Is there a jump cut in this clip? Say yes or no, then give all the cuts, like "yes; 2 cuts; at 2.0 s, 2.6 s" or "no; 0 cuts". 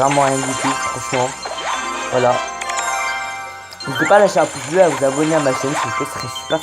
yes; 1 cut; at 1.3 s